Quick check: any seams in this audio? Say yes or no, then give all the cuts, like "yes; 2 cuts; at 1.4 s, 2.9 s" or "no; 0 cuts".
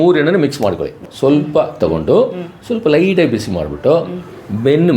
yes; 1 cut; at 1.0 s